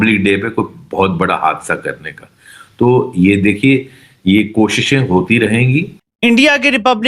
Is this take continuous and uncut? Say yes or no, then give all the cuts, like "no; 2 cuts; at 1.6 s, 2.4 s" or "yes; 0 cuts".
no; 1 cut; at 6.0 s